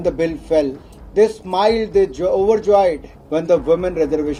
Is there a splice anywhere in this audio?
no; 0 cuts

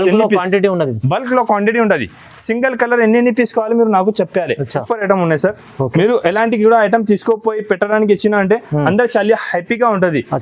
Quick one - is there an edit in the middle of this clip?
yes; 1 cut; at 4.7 s

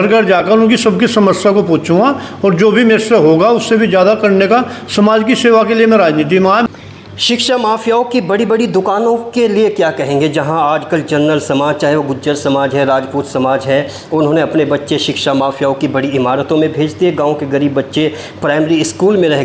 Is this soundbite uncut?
no; 1 cut; at 6.7 s

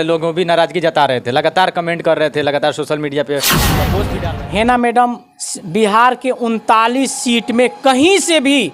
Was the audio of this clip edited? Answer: yes; 1 cut; at 3.9 s

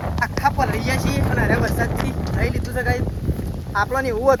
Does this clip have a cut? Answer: no; 0 cuts

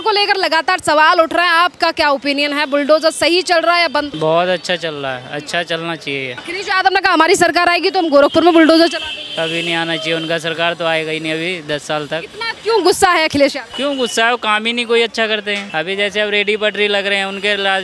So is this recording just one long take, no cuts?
no; 4 cuts; at 4.1 s, 6.4 s, 13.7 s, 15.6 s

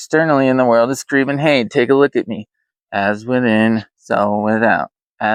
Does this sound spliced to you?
no; 0 cuts

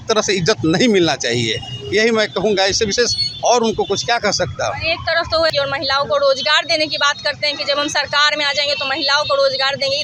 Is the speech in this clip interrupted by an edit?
no; 0 cuts

